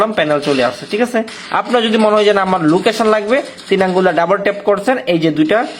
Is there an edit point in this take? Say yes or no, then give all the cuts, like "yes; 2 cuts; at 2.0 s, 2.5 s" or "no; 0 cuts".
yes; 1 cut; at 1.4 s